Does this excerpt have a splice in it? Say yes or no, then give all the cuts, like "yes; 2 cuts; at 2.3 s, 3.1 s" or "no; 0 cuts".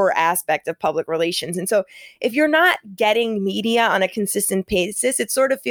no; 0 cuts